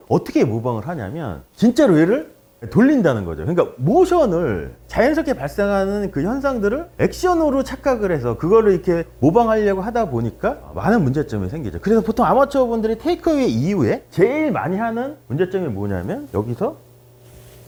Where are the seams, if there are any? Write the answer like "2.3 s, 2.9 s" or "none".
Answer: none